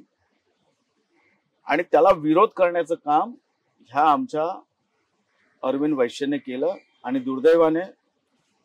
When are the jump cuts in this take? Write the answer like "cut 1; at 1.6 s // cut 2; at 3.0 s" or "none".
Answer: none

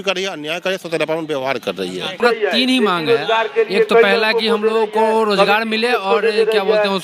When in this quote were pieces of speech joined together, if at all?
cut 1; at 2.2 s

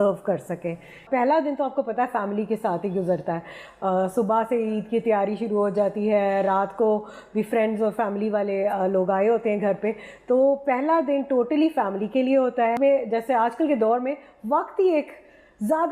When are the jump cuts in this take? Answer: cut 1; at 1.0 s // cut 2; at 12.8 s

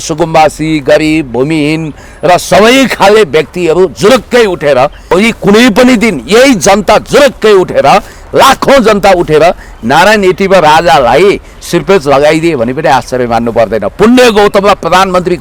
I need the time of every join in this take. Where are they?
cut 1; at 5.1 s

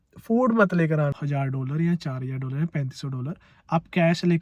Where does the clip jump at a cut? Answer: cut 1; at 1.2 s

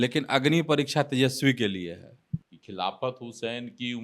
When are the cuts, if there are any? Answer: cut 1; at 2.3 s

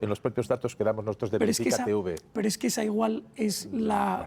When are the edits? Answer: none

